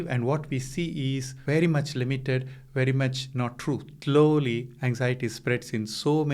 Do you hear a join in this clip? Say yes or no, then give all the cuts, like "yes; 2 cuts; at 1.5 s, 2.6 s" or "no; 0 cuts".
yes; 2 cuts; at 1.3 s, 3.9 s